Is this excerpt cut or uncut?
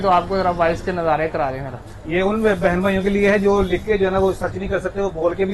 uncut